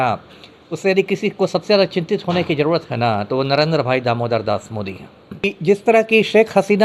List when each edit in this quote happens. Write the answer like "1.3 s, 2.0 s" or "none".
5.4 s